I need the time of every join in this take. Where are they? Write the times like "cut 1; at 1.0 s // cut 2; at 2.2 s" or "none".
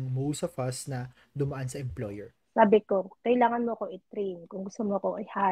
cut 1; at 2.3 s

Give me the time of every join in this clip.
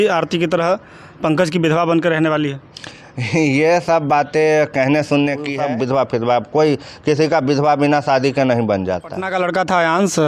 cut 1; at 5.6 s // cut 2; at 9.2 s

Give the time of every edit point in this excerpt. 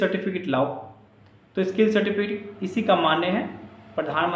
none

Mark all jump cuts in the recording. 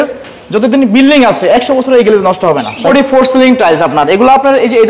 cut 1; at 2.9 s

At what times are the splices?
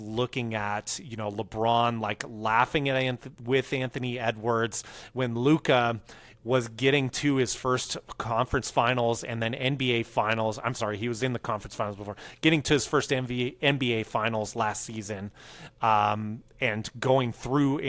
none

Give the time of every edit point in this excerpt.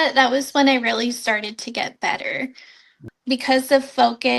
cut 1; at 3.1 s

